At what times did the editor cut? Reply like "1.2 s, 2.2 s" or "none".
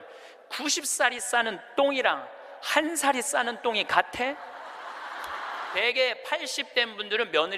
5.7 s